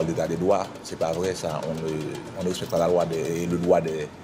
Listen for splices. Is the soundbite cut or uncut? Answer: uncut